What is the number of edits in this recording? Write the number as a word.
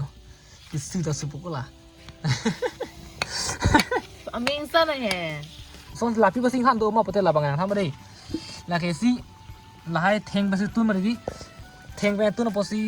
one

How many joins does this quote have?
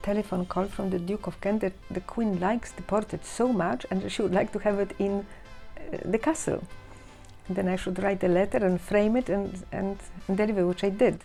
zero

